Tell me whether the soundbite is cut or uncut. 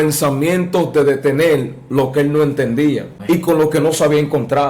cut